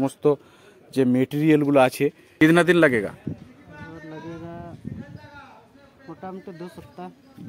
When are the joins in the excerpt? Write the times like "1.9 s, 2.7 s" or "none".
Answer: 2.2 s